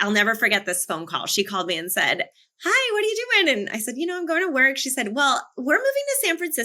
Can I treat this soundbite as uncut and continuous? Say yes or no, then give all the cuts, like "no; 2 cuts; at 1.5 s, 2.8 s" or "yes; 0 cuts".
yes; 0 cuts